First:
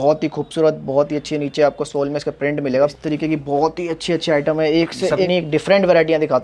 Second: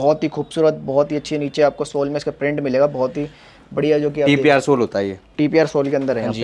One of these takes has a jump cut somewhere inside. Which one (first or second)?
first